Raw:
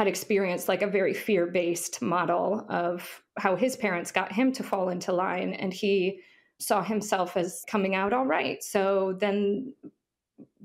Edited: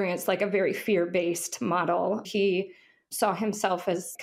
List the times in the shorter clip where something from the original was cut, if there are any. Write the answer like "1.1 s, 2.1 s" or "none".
2.3 s